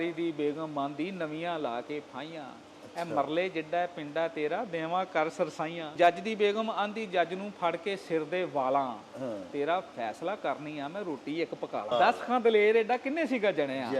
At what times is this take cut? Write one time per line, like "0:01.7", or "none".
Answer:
0:05.9
0:11.9